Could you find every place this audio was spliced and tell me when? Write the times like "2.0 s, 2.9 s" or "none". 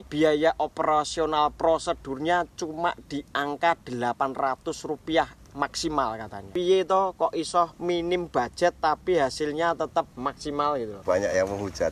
6.4 s, 11.0 s